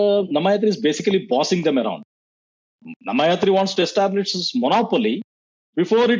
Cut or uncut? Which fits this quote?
uncut